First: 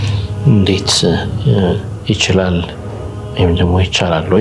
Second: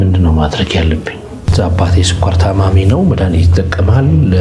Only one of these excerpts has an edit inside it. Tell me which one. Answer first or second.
second